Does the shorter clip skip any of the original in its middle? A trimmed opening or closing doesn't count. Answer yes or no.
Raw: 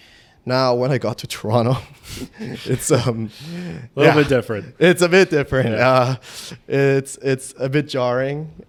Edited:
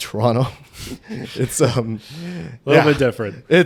no